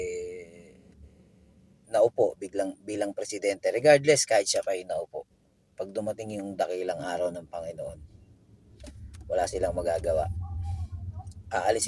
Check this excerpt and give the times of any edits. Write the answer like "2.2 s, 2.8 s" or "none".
none